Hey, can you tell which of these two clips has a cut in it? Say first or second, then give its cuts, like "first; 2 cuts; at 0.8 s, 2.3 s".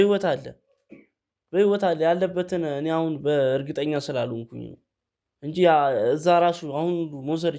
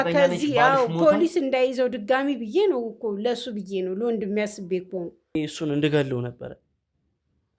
second; 1 cut; at 5.4 s